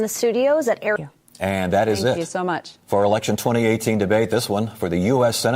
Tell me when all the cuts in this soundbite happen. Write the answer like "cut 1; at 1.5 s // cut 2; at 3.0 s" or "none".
cut 1; at 1.0 s

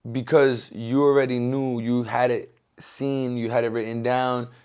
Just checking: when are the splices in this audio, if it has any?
none

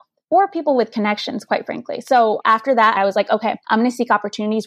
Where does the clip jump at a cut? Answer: cut 1; at 3.0 s

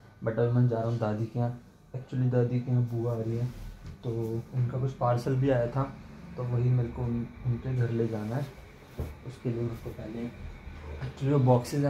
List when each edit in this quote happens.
none

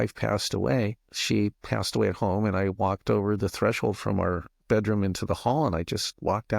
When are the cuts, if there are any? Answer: cut 1; at 1.1 s

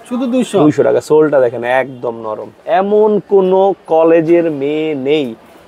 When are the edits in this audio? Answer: cut 1; at 2.5 s

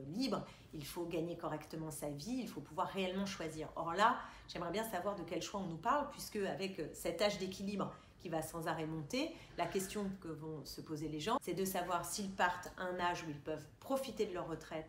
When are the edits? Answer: none

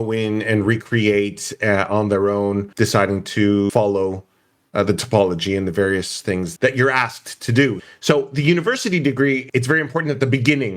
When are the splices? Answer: cut 1; at 2.7 s // cut 2; at 3.7 s // cut 3; at 6.5 s // cut 4; at 7.8 s // cut 5; at 9.4 s

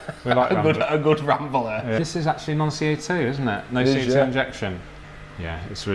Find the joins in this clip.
cut 1; at 2.0 s // cut 2; at 4.9 s

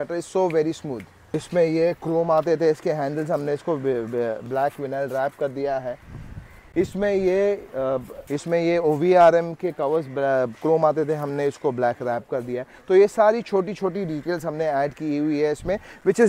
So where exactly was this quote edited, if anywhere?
cut 1; at 1.4 s // cut 2; at 8.2 s

